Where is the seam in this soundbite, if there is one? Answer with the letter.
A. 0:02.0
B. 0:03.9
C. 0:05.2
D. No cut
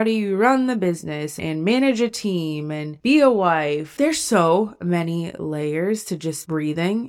B